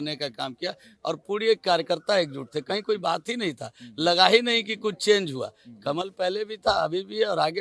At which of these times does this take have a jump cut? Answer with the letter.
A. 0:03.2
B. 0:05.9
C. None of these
C